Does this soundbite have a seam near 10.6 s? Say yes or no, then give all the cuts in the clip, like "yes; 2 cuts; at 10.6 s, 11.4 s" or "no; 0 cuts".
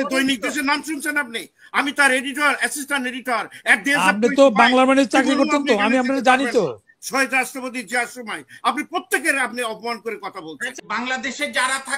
yes; 1 cut; at 10.6 s